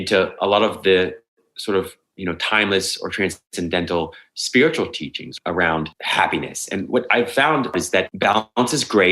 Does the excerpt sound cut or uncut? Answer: cut